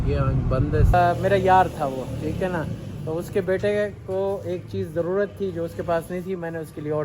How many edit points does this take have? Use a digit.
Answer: 1